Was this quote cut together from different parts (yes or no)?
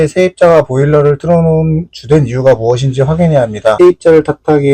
yes